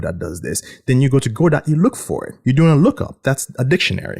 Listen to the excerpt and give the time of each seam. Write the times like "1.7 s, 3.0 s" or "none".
2.3 s, 3.1 s